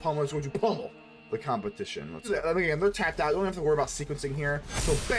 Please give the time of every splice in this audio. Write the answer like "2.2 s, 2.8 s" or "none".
2.3 s